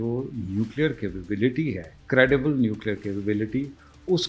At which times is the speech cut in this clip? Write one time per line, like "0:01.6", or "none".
0:01.9